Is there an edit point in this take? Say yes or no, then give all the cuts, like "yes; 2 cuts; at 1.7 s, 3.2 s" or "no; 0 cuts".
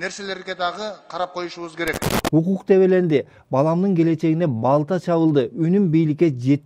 yes; 1 cut; at 2.1 s